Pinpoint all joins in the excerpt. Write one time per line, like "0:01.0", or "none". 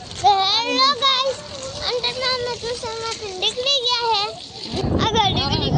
0:04.8